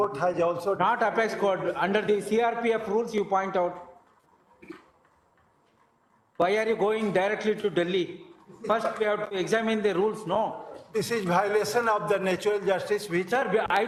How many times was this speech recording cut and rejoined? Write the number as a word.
zero